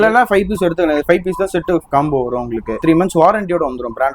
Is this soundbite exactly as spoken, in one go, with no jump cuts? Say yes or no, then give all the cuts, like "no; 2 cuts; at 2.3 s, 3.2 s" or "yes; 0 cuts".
no; 1 cut; at 2.8 s